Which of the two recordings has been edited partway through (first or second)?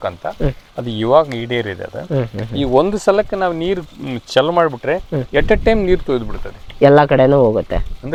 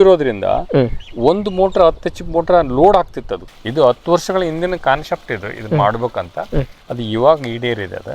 second